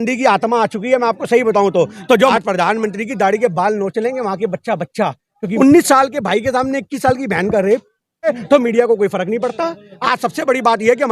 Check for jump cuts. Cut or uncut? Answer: cut